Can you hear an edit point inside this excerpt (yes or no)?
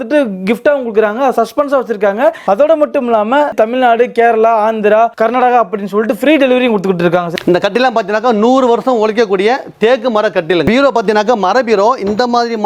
yes